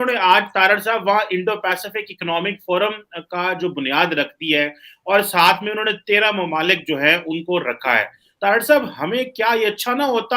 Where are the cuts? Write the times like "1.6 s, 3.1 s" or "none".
8.2 s